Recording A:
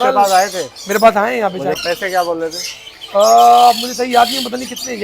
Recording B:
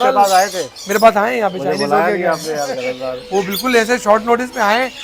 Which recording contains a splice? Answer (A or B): A